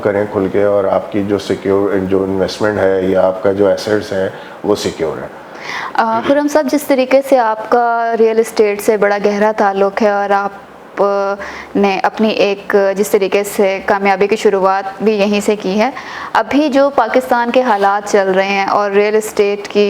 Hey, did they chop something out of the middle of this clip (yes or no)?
no